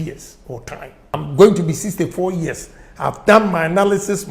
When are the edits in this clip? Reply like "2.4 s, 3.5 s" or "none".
1.1 s